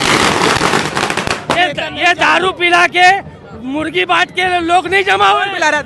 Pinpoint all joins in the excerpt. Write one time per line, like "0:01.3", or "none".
0:01.6